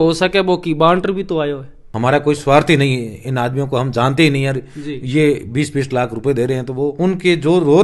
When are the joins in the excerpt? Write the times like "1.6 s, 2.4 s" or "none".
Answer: 1.9 s